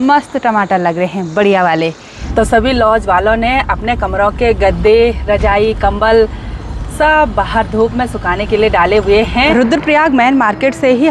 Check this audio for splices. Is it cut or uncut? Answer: cut